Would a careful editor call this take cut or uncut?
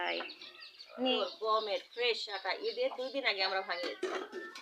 cut